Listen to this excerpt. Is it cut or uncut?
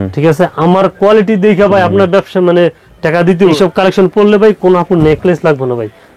cut